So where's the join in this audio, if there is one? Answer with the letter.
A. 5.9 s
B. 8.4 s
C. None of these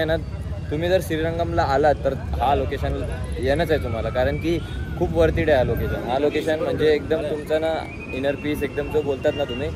C